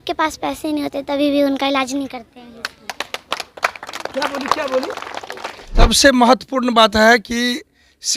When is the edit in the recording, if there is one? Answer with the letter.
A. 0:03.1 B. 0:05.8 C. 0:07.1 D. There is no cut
B